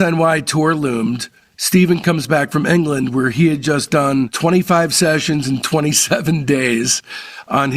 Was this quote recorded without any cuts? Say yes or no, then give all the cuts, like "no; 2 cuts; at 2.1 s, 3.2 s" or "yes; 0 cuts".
yes; 0 cuts